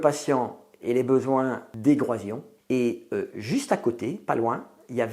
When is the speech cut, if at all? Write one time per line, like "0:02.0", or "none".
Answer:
0:01.7